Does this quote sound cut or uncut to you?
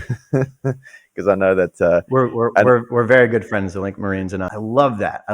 cut